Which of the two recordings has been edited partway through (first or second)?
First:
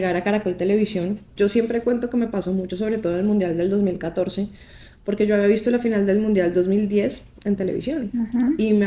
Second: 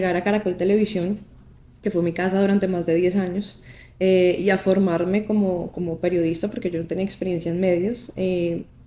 first